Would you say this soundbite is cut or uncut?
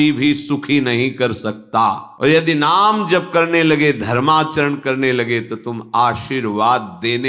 cut